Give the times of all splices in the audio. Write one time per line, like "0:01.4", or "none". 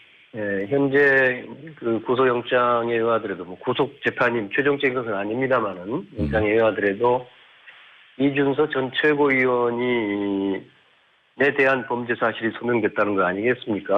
0:08.2